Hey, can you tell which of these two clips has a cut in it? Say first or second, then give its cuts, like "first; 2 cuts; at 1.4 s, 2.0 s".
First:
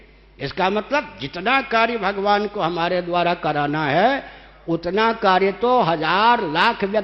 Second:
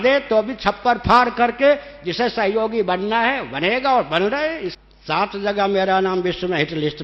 second; 1 cut; at 4.7 s